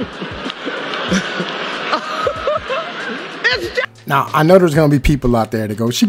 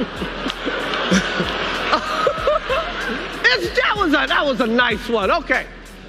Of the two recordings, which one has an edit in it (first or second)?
second